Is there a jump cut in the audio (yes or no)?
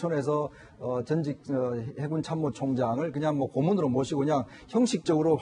no